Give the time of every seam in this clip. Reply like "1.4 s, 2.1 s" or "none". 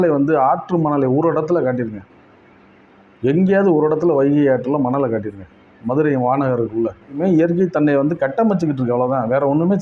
7.2 s